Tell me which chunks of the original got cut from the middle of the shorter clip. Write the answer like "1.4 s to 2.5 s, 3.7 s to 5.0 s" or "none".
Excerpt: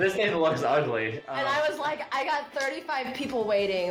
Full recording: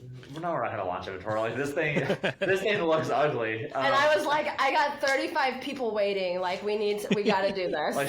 none